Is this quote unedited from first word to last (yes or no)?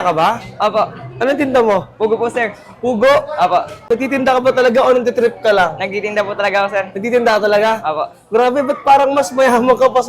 yes